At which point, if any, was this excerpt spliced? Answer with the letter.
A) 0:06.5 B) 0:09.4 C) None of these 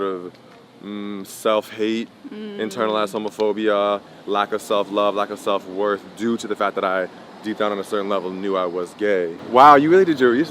B